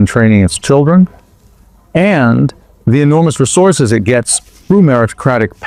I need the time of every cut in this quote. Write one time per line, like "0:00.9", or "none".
none